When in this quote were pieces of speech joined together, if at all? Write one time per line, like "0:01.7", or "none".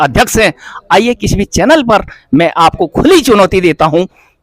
none